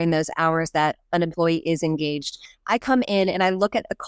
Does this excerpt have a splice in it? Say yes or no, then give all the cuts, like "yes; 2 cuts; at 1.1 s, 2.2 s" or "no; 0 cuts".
yes; 1 cut; at 2.5 s